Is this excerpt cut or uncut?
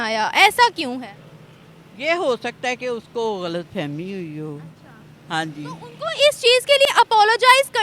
uncut